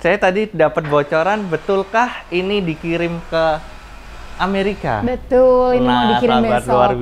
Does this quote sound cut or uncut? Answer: uncut